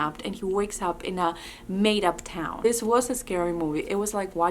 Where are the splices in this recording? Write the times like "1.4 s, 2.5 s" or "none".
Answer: 2.6 s